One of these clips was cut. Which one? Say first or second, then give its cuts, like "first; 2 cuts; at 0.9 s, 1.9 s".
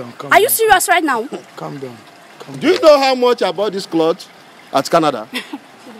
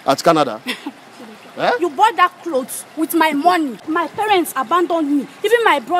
second; 1 cut; at 3.9 s